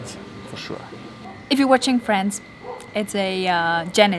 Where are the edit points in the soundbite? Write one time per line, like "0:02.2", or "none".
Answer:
0:01.2